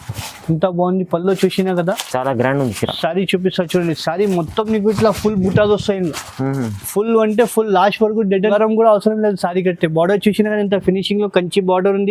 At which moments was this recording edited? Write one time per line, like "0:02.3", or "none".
0:08.5